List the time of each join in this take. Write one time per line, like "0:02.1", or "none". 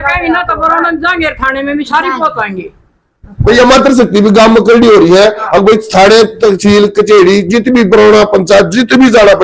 none

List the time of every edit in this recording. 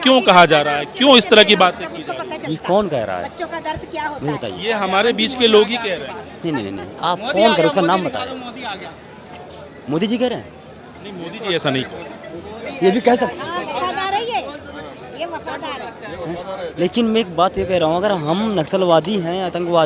none

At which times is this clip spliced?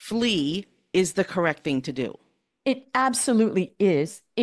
none

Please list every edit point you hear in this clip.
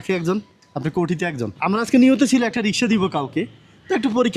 0:01.5

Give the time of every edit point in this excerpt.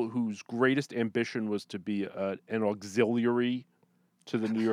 none

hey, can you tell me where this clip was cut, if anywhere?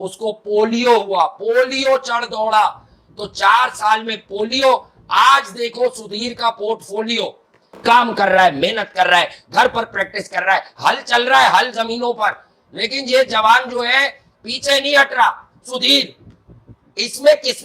0:07.7

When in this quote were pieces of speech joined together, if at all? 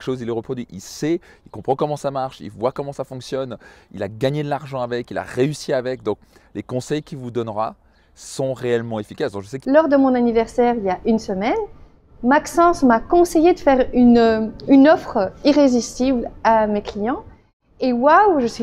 0:09.5

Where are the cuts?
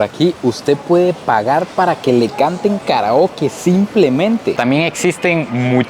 0:04.6

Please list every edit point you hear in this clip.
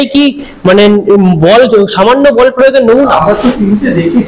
0:03.1

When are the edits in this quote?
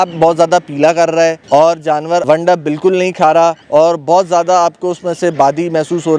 0:01.4
0:02.2
0:03.6

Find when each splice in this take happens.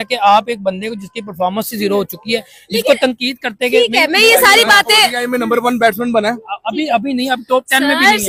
none

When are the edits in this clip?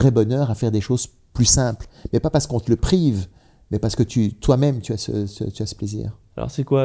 none

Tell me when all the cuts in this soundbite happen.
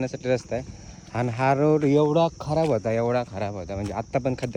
none

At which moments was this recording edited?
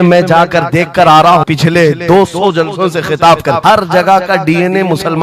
0:01.5
0:03.6

